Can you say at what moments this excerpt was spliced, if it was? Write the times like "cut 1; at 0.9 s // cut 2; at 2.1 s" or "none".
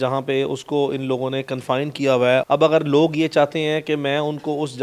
cut 1; at 2.4 s